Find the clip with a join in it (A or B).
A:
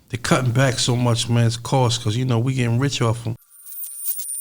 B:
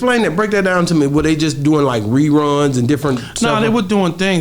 A